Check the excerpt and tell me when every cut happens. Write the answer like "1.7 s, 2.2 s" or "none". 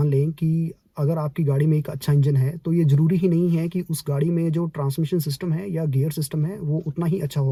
none